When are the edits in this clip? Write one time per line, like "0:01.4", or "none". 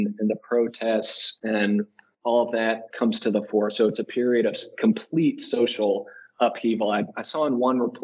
0:02.9